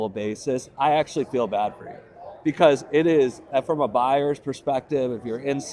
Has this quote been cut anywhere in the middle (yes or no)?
no